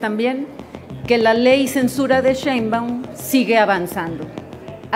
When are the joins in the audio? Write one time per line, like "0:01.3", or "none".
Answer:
none